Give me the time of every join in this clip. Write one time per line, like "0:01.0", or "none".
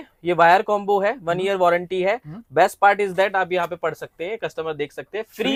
none